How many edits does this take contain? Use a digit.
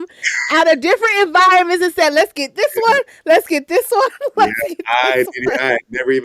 0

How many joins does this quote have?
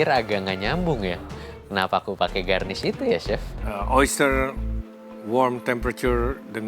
1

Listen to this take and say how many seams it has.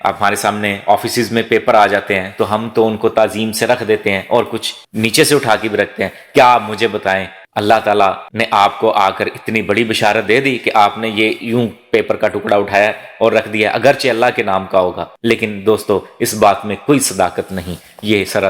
0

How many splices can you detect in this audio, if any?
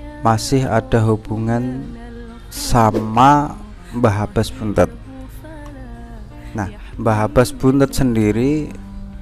0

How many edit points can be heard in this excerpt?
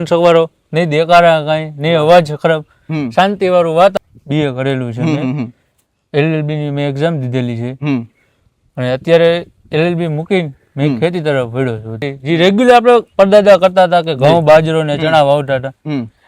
2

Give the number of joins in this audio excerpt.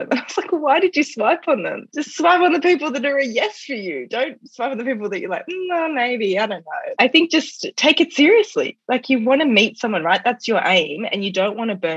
3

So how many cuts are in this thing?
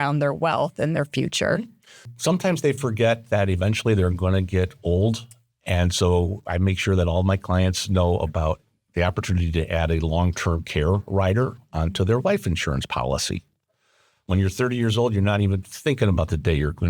1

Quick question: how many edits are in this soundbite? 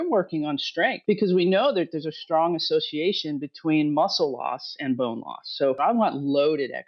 2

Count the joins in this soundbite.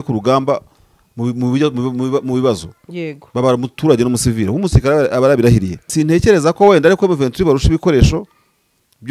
1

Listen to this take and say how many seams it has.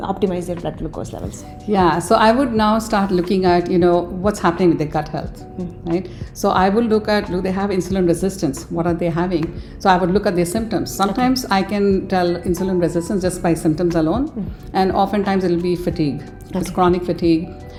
0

